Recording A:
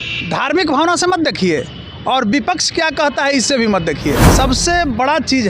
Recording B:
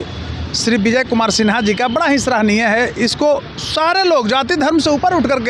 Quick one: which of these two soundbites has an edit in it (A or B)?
A